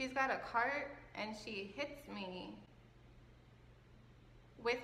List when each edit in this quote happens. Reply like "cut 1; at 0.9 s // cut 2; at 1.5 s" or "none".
none